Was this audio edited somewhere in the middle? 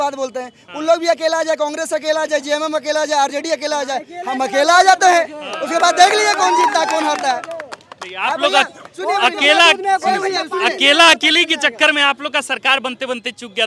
no; 0 cuts

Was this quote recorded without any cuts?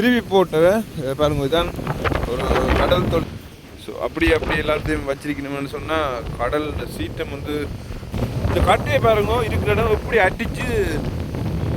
no; 2 cuts; at 3.3 s, 8.1 s

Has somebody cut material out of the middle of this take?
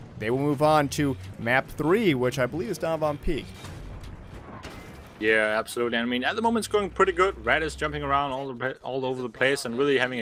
no; 0 cuts

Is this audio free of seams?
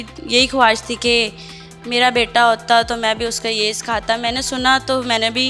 yes; 0 cuts

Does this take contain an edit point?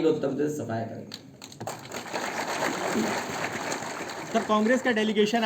no; 0 cuts

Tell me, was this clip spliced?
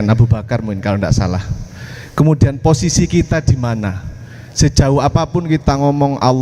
no; 0 cuts

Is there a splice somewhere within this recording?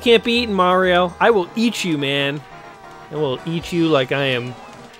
no; 0 cuts

